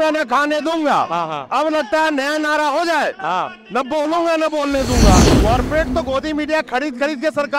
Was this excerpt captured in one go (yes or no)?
no